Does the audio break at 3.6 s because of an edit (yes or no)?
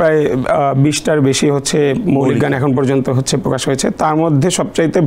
no